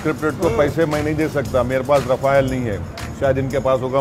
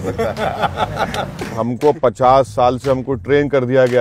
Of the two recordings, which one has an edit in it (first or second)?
second